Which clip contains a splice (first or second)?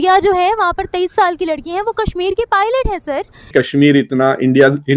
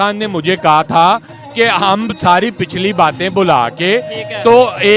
first